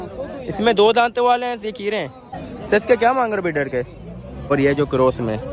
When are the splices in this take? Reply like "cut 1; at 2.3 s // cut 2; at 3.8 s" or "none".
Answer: none